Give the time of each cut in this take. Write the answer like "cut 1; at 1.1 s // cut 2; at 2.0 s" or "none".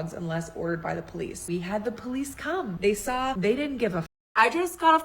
cut 1; at 1.4 s // cut 2; at 2.7 s // cut 3; at 3.4 s // cut 4; at 4.1 s

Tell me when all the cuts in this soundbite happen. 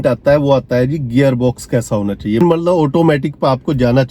cut 1; at 2.4 s

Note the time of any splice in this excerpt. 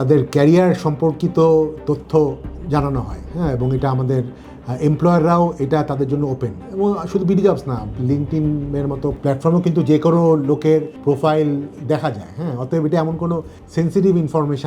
cut 1; at 9.2 s // cut 2; at 10.9 s // cut 3; at 13.6 s

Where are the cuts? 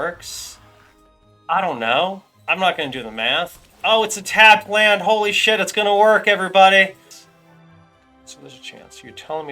cut 1; at 7.1 s

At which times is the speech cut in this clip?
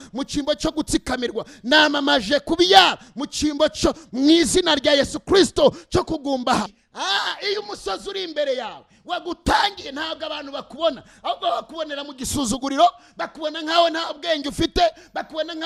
cut 1; at 6.8 s

